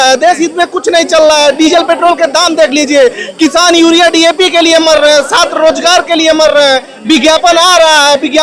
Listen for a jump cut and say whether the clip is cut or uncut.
uncut